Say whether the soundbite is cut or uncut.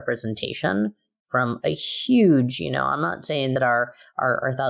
cut